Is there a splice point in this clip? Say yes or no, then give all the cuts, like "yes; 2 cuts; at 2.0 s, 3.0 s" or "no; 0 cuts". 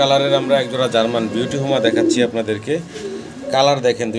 no; 0 cuts